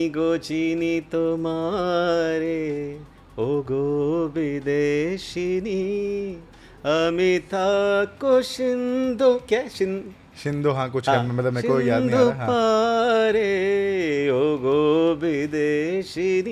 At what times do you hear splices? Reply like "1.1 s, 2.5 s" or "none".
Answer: none